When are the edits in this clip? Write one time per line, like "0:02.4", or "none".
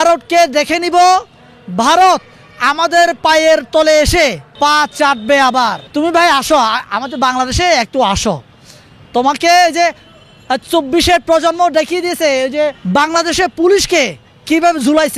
0:04.4
0:05.8
0:12.8